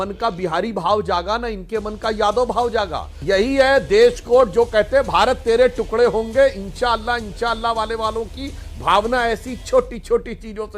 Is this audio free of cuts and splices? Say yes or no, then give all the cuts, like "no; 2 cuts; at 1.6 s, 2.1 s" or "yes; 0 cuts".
no; 1 cut; at 3.1 s